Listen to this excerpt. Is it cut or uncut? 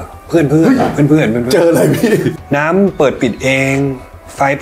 cut